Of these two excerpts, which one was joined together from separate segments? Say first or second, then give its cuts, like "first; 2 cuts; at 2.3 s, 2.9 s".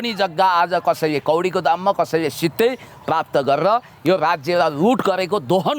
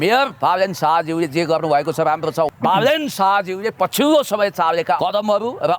second; 2 cuts; at 2.5 s, 5.0 s